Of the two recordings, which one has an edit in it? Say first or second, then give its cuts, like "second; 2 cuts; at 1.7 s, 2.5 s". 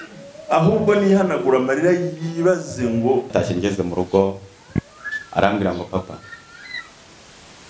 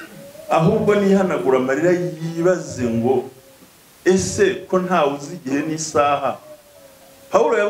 first; 1 cut; at 3.3 s